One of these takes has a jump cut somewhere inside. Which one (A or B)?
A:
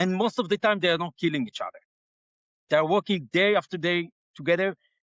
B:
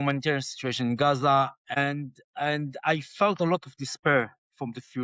B